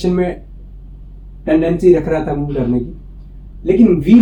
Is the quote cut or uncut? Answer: uncut